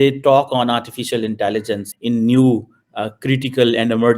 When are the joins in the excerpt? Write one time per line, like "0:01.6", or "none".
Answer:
0:01.8